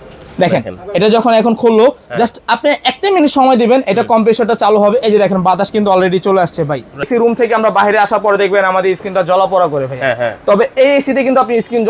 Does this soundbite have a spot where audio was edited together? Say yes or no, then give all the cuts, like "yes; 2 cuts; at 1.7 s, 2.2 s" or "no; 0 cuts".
yes; 1 cut; at 7.1 s